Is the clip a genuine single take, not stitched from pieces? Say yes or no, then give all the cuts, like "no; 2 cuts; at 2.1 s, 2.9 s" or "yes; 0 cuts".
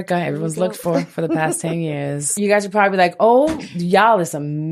no; 1 cut; at 2.3 s